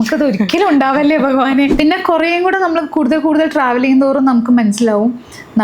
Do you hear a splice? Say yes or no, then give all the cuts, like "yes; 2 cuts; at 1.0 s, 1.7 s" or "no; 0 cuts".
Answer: yes; 1 cut; at 1.7 s